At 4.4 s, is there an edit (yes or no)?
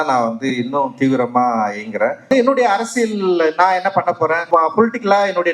yes